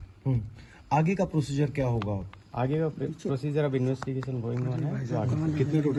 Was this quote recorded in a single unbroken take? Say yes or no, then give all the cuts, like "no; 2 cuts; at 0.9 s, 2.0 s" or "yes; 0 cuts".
yes; 0 cuts